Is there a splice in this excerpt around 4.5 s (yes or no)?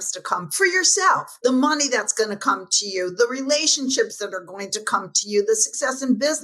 no